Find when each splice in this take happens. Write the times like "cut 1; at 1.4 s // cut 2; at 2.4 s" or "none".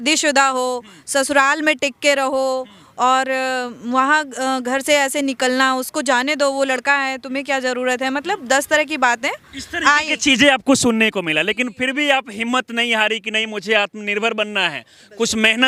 none